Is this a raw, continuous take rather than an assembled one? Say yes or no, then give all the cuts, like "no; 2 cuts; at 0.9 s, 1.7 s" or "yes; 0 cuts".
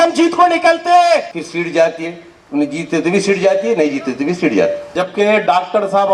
no; 2 cuts; at 1.3 s, 4.8 s